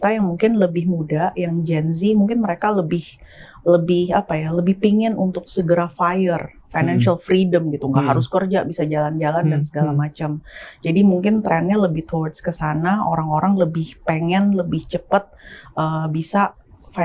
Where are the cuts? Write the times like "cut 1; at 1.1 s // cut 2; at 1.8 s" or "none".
none